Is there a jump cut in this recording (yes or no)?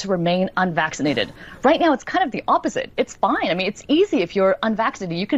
no